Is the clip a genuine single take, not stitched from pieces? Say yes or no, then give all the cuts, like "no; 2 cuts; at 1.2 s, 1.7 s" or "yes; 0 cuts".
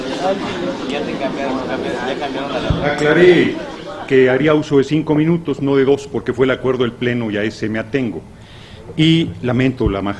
no; 1 cut; at 7.7 s